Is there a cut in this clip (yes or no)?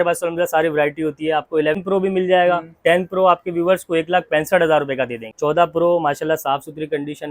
yes